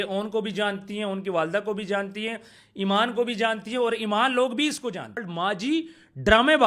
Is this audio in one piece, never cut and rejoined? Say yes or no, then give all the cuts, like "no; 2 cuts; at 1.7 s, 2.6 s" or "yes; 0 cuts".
no; 1 cut; at 5.3 s